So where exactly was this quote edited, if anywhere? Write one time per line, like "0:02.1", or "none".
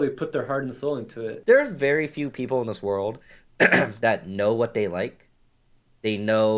0:01.3